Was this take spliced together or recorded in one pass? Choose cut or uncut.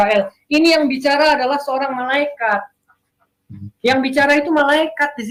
uncut